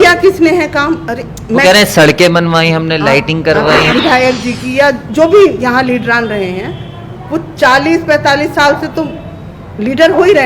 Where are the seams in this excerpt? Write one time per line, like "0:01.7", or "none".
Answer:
0:03.9